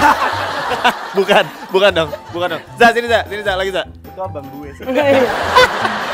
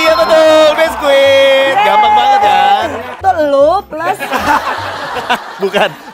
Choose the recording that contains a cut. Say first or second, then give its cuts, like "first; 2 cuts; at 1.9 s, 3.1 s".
second; 1 cut; at 3.1 s